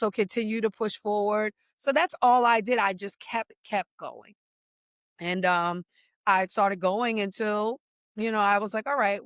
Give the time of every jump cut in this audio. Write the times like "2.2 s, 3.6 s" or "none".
none